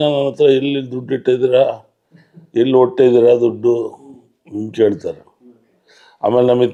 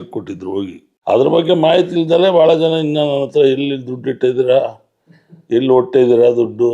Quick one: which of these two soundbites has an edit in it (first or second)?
second